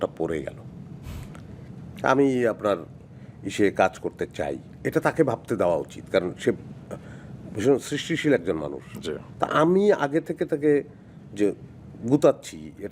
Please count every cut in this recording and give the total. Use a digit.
1